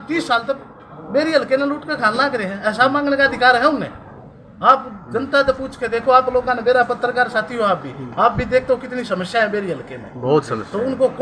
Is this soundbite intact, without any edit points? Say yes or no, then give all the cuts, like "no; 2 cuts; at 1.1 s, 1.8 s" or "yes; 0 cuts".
yes; 0 cuts